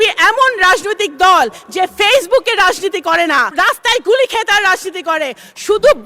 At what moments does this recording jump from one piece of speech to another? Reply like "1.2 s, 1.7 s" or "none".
3.5 s